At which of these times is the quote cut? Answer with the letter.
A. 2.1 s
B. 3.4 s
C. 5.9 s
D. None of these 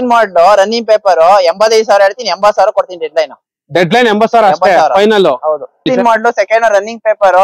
C